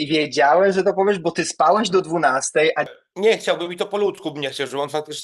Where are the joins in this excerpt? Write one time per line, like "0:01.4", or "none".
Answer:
0:03.0